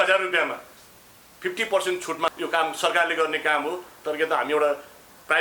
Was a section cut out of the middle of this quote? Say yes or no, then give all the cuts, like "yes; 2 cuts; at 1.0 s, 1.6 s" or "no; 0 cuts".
yes; 1 cut; at 2.3 s